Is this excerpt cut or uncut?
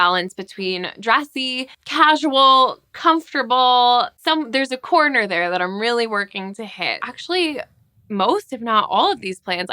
cut